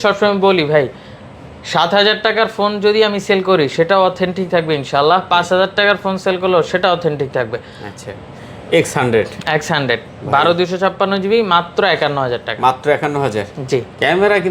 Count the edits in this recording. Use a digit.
0